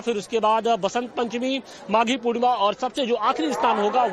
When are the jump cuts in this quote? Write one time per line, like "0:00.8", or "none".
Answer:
0:02.8